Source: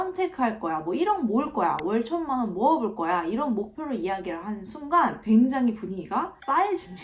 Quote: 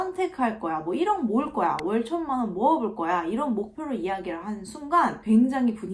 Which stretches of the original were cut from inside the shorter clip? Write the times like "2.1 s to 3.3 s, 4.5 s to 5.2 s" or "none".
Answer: none